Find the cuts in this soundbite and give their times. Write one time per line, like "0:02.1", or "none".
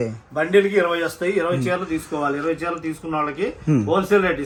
none